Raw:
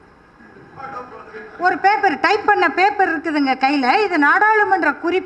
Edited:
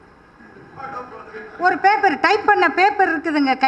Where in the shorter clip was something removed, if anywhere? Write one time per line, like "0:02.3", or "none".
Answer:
none

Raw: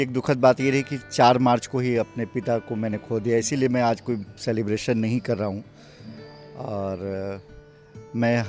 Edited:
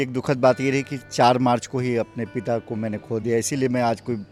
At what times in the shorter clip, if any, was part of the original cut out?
none

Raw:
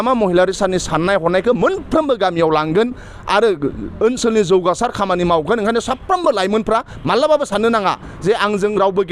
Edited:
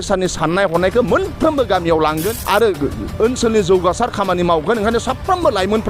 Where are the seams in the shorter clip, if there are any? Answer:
0:02.3

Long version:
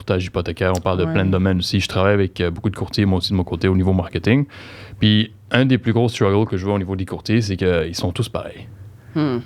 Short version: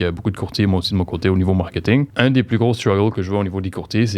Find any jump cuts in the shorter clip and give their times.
0:02.1

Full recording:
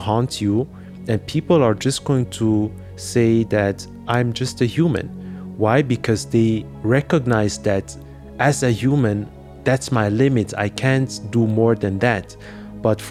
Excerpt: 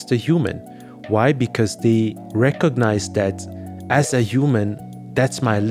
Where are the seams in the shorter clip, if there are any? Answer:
none

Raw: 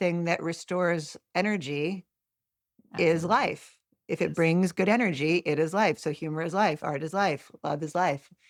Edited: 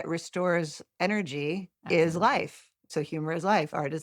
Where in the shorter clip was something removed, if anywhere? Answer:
0:01.7
0:02.9

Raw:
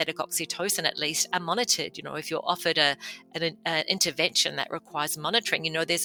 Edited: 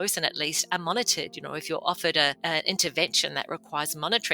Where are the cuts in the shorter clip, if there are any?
0:02.4

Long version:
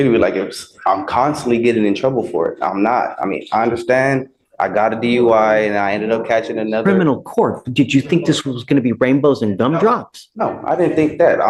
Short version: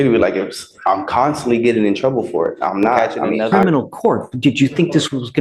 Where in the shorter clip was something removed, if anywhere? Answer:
0:03.2

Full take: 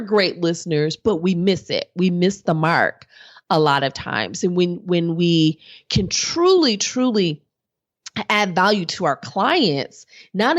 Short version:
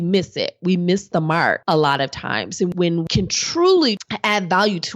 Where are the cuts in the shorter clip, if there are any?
0:01.6
0:02.7
0:04.0

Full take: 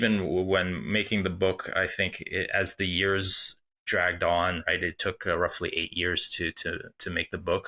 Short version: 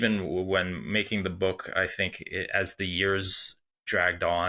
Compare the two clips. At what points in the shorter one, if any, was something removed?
none

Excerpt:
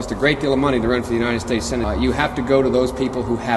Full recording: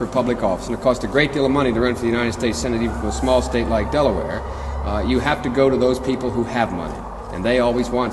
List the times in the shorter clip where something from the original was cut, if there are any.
0:01.8

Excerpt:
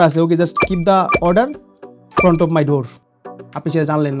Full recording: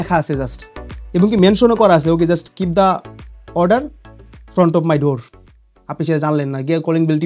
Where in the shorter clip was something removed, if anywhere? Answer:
0:01.1

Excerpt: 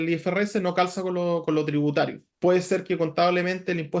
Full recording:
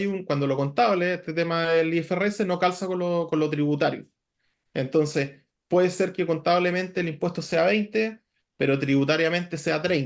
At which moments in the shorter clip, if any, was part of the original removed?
0:02.2

